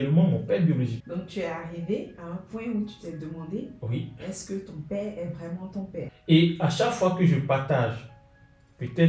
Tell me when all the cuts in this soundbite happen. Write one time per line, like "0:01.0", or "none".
0:01.0
0:06.0